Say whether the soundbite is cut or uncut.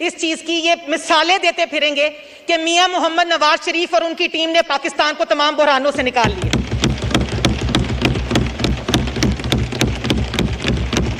uncut